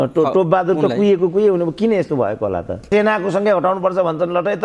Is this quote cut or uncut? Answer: cut